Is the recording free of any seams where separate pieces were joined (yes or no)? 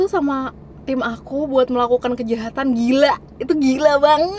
yes